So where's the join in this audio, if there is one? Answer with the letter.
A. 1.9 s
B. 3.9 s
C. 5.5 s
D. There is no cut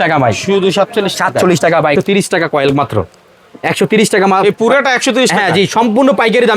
A